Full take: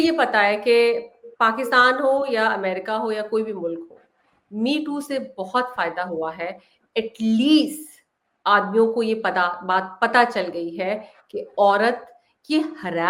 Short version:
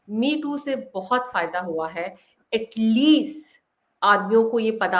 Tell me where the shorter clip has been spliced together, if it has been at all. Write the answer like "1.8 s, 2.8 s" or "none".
none